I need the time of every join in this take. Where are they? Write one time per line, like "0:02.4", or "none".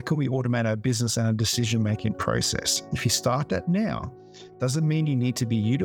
none